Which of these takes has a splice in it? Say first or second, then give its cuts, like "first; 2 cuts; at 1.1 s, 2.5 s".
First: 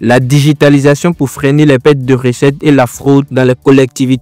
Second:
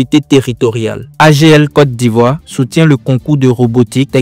second; 1 cut; at 1.0 s